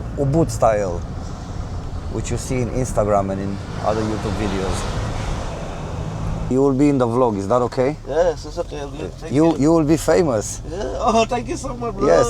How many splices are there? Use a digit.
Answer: 1